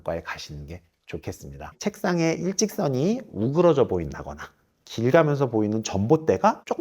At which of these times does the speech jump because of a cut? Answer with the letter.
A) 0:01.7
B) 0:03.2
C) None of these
A